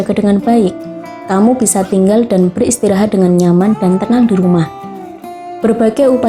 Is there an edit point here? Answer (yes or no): no